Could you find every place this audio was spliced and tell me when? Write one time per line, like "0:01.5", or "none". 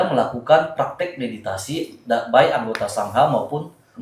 none